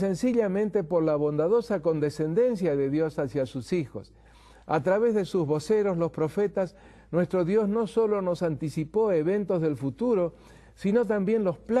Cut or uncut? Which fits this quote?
uncut